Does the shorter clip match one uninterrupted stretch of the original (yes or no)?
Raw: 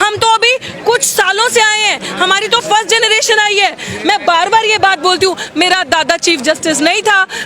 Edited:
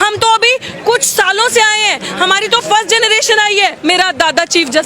no